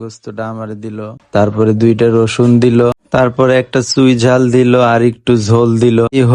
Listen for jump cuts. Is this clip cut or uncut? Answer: uncut